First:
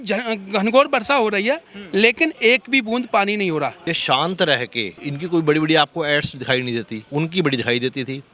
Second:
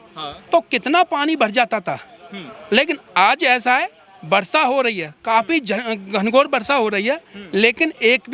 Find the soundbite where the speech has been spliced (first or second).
first